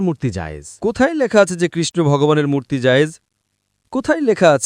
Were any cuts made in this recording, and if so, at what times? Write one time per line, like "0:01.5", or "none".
none